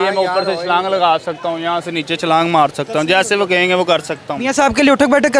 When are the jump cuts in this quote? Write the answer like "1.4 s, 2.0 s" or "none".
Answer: none